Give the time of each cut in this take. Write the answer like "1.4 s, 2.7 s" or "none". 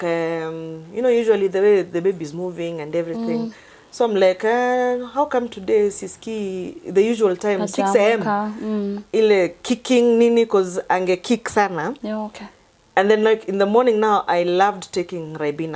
none